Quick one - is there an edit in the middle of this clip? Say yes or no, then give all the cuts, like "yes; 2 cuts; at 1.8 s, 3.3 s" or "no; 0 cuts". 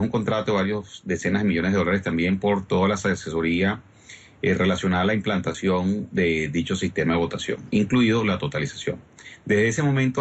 yes; 1 cut; at 4.0 s